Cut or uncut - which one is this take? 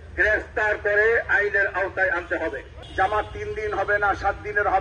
cut